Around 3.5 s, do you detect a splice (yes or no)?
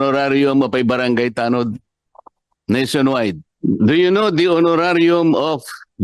yes